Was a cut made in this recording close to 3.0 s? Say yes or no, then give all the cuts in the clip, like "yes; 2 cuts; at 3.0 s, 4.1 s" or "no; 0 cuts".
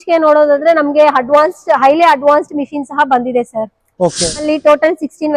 no; 1 cut; at 4.4 s